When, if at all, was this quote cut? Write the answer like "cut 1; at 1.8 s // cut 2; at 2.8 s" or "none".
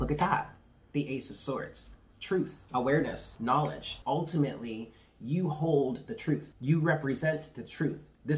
cut 1; at 2.6 s // cut 2; at 3.8 s // cut 3; at 6.5 s